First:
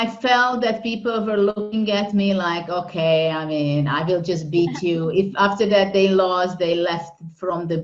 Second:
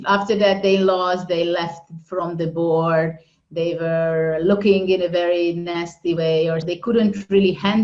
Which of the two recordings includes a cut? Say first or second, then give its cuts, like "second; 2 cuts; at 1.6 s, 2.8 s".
second; 1 cut; at 6.7 s